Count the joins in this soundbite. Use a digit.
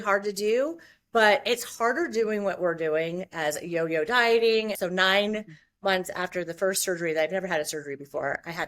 1